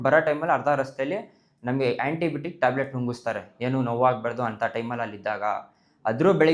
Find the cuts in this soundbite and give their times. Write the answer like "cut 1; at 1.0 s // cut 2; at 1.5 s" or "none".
none